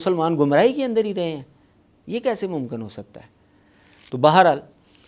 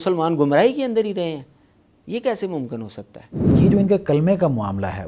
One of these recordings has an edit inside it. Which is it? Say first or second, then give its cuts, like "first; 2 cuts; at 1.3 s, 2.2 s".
second; 1 cut; at 3.6 s